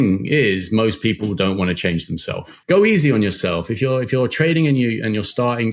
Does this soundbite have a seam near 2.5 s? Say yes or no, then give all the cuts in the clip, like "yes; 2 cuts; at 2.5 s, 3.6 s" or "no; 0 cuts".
yes; 1 cut; at 2.5 s